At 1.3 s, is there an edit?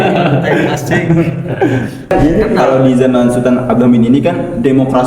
no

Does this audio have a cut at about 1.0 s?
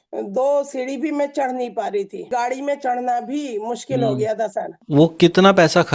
no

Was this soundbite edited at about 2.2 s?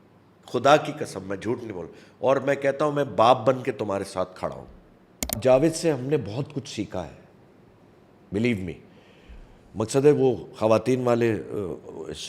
no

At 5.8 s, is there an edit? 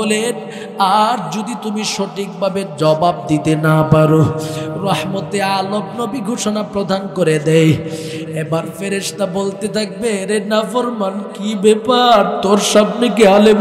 no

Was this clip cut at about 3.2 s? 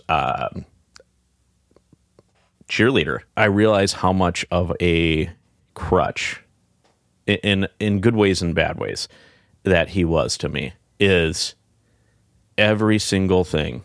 yes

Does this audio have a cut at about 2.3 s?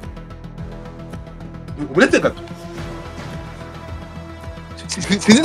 yes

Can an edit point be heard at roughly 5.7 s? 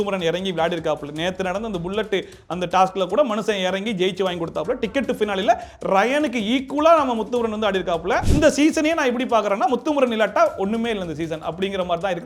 no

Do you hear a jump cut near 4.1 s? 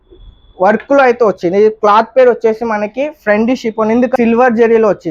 yes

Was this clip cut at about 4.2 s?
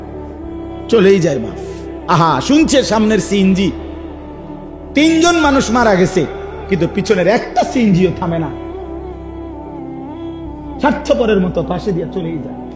no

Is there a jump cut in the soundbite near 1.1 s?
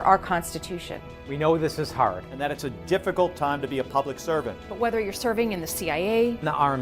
yes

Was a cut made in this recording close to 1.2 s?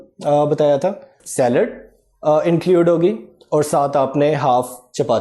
yes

